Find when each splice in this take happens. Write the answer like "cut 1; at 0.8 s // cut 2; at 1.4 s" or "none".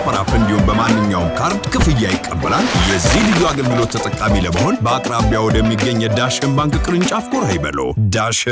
none